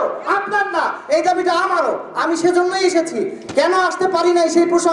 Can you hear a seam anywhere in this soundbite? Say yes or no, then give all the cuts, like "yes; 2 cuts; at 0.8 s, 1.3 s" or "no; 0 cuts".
no; 0 cuts